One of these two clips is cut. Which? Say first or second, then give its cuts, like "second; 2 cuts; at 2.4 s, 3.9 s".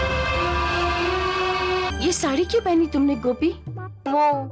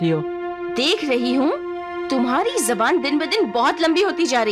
first; 1 cut; at 1.9 s